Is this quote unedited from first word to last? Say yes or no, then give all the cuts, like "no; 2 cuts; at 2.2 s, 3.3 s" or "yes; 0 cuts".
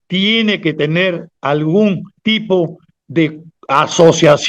no; 3 cuts; at 1.3 s, 2.1 s, 3.5 s